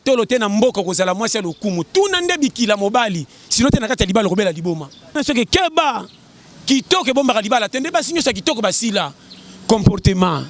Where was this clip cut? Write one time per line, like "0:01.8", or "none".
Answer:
0:05.1